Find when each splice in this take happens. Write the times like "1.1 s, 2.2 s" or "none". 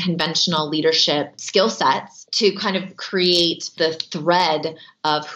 1.4 s, 2.2 s, 3.7 s